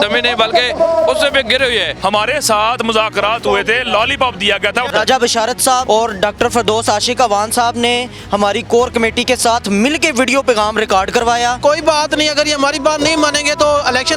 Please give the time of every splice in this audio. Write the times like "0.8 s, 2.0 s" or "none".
1.9 s, 4.9 s, 5.8 s, 11.6 s